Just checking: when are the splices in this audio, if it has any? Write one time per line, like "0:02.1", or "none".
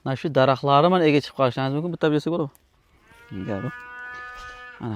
none